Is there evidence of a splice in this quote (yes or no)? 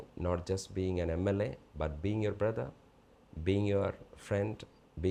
no